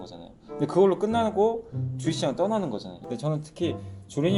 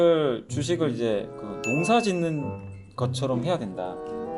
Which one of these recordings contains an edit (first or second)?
first